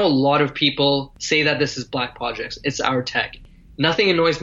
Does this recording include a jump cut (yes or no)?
yes